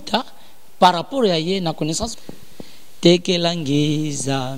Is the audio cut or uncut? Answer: cut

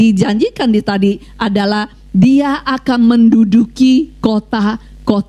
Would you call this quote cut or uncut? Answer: uncut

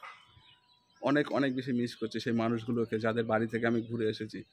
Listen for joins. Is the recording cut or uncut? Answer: uncut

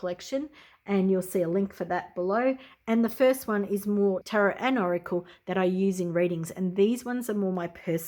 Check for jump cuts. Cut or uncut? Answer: cut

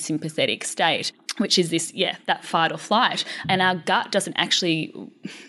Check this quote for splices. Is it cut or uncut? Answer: cut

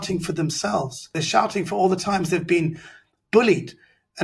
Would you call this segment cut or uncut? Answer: cut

